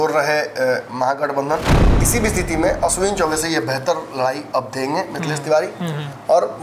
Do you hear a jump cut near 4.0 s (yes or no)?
no